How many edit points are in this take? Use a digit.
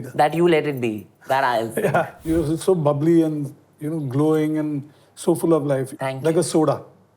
2